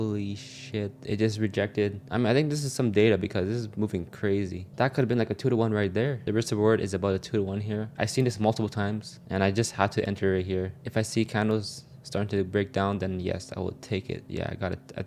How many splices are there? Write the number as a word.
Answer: four